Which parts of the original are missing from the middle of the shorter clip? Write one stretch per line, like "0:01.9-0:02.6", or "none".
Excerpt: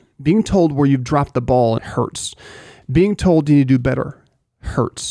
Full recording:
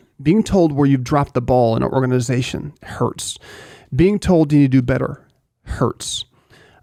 0:01.8-0:02.8